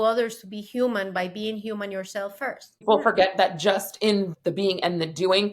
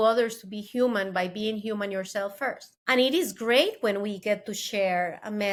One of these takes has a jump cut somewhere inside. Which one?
first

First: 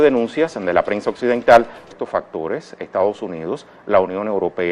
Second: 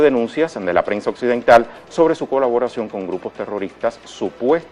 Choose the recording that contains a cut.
second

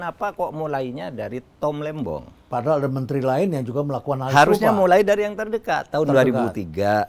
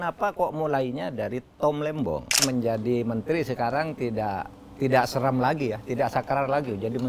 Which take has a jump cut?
second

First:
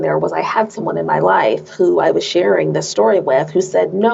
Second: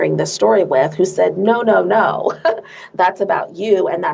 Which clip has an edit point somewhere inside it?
second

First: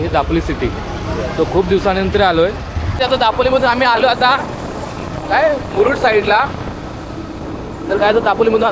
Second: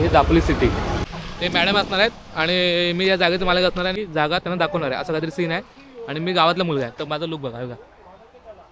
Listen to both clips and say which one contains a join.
second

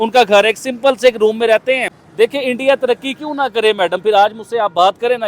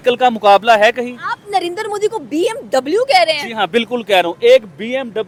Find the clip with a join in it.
first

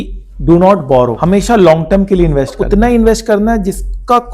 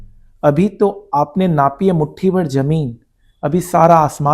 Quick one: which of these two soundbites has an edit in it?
first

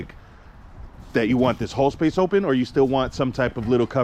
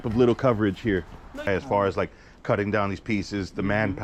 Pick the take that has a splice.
second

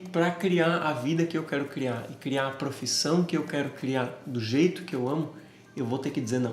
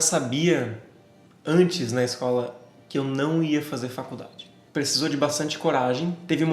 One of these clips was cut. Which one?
second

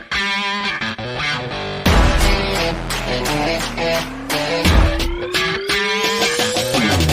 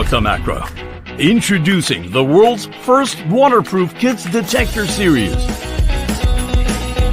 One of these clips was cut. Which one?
first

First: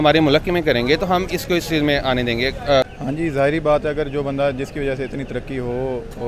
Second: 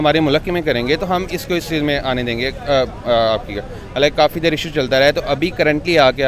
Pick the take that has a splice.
first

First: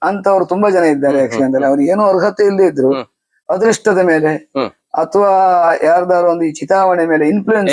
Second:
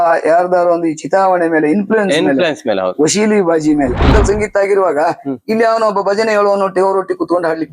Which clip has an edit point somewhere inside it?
second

